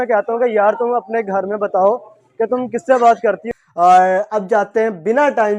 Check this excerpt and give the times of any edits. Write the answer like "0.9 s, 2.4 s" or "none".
3.4 s